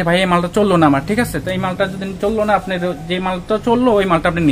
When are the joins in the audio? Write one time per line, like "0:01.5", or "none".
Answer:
none

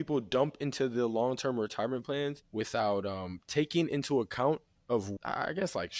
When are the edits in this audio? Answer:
0:02.4
0:05.1

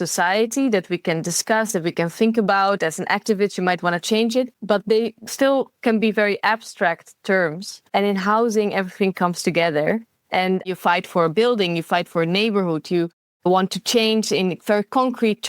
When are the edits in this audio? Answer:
0:04.6
0:07.7
0:10.7

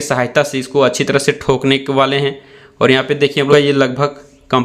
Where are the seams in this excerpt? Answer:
0:03.5

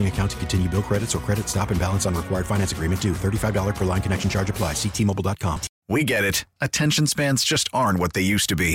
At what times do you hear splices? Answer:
0:05.7

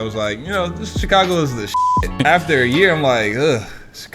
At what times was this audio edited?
0:01.9

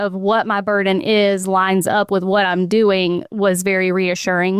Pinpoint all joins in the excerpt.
none

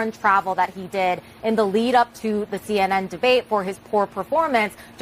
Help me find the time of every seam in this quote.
none

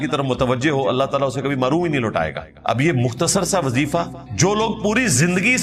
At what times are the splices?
0:02.5
0:04.2

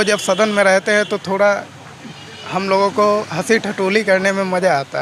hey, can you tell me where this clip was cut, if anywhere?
none

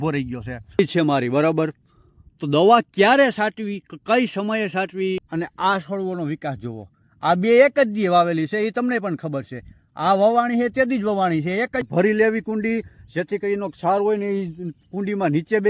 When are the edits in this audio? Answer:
0:00.8
0:05.3
0:11.8

